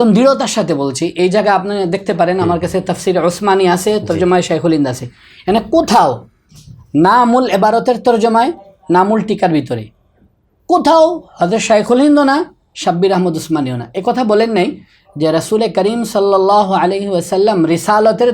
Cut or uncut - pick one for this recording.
uncut